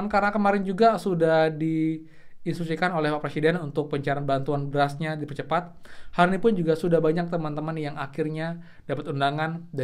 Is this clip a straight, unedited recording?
yes; 0 cuts

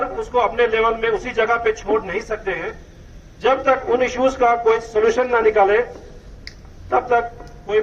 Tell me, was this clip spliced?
no; 0 cuts

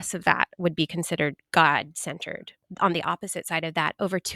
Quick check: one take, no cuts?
no; 2 cuts; at 1.4 s, 2.6 s

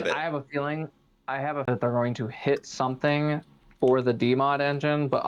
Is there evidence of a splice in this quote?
yes; 1 cut; at 1.7 s

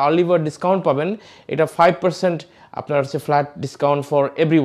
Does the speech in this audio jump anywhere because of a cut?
no; 0 cuts

